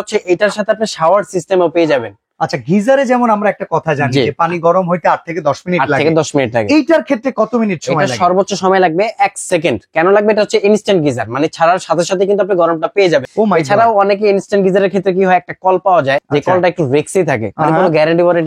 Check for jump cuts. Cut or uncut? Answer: uncut